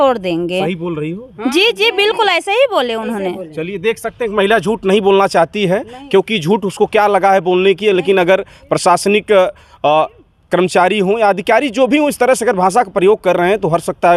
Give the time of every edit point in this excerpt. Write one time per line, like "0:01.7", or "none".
none